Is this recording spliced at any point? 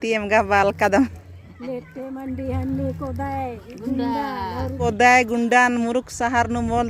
yes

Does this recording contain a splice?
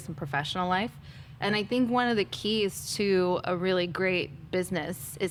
no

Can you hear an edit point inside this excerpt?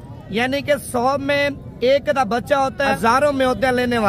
yes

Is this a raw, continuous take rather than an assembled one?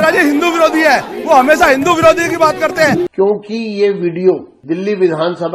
no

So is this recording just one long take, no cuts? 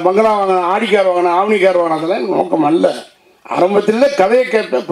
yes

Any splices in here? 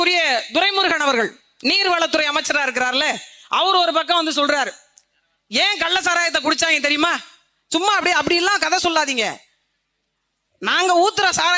no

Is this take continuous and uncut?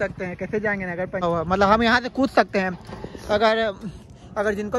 no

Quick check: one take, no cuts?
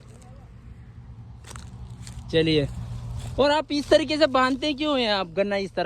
yes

